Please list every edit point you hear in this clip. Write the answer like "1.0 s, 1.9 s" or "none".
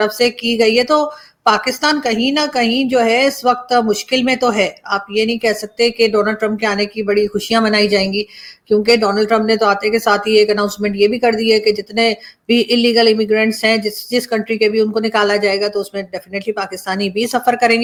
none

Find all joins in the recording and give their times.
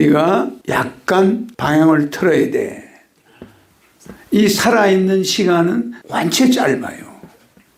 none

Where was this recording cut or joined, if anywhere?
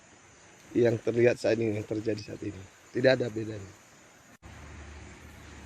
4.4 s

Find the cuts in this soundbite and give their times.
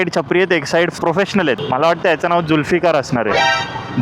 1.6 s

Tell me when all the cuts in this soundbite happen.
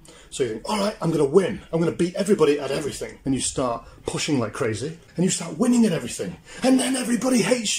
3.1 s, 5.0 s

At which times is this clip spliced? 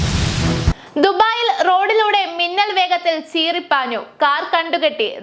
none

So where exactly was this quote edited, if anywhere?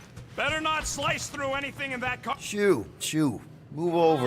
2.3 s

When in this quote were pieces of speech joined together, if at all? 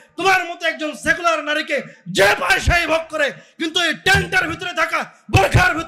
none

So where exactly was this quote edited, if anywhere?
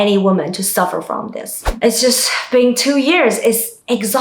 1.7 s

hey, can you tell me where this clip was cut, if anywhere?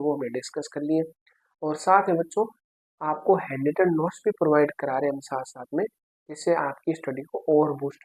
none

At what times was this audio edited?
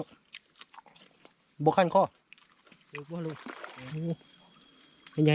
1.2 s, 3.0 s

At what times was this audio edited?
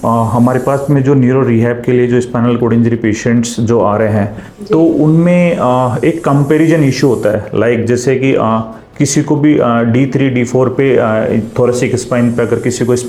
none

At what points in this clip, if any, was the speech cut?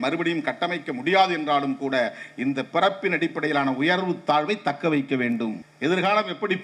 5.7 s

